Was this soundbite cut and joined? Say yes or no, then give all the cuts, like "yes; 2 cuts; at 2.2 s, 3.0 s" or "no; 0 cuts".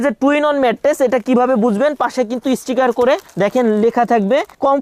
no; 0 cuts